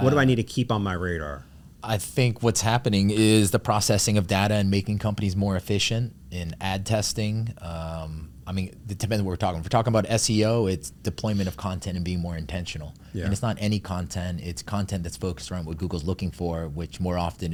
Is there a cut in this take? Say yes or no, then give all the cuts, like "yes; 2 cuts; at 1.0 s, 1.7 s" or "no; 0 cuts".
no; 0 cuts